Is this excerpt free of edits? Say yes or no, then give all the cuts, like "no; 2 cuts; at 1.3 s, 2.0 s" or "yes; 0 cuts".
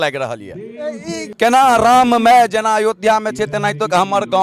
no; 1 cut; at 1.2 s